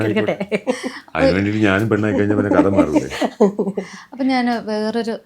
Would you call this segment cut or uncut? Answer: uncut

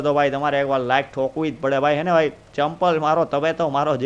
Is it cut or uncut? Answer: uncut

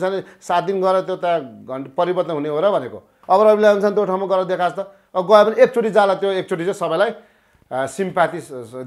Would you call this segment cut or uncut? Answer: uncut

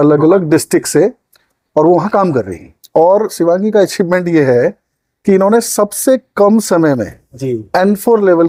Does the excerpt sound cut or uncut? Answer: uncut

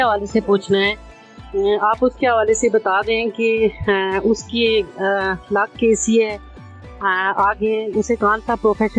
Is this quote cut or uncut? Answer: uncut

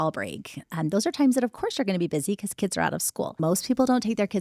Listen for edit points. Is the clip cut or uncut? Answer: cut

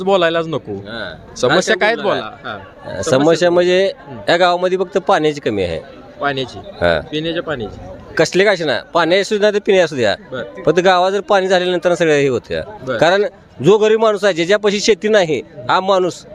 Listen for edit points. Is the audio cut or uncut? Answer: uncut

